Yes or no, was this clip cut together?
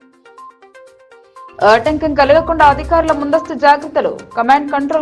no